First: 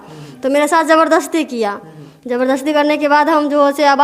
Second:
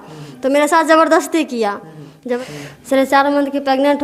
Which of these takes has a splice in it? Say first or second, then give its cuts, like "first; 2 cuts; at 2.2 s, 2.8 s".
second; 1 cut; at 2.4 s